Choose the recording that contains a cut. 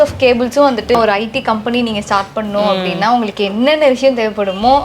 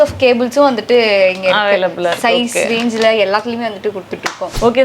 first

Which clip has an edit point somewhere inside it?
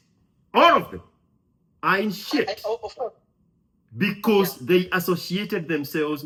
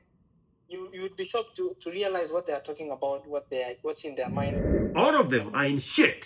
second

